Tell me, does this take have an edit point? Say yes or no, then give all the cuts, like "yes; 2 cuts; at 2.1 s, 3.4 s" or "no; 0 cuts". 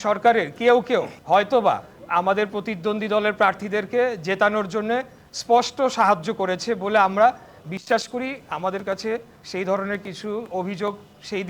yes; 2 cuts; at 1.2 s, 1.9 s